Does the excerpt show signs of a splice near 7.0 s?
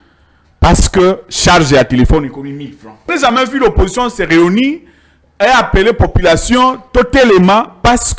no; 1 cut; at 3.1 s

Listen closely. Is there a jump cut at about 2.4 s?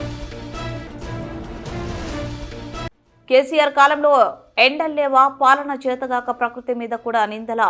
yes; 1 cut; at 2.4 s

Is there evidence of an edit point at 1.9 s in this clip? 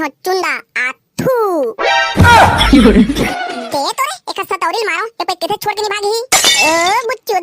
no; 1 cut; at 3.3 s

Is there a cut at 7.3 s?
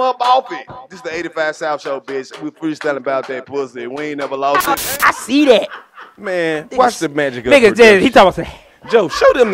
no; 1 cut; at 4.8 s

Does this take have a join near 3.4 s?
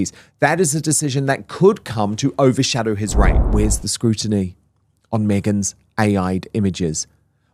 yes; 1 cut; at 3.4 s

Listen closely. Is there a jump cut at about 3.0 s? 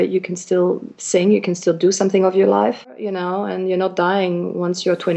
yes; 1 cut; at 3.0 s

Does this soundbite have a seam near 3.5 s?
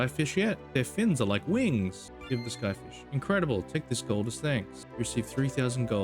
no; 2 cuts; at 2.1 s, 4.8 s

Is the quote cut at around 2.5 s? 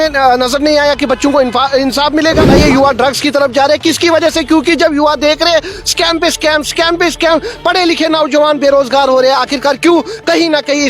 yes; 1 cut; at 2.5 s

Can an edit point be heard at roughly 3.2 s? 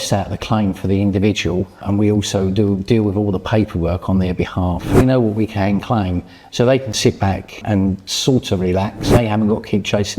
no; 4 cuts; at 1.8 s, 5.0 s, 7.6 s, 9.1 s

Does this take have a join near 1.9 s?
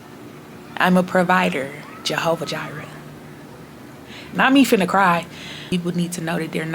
no; 1 cut; at 5.6 s

